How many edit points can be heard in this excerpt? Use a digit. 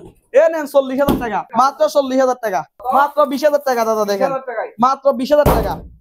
2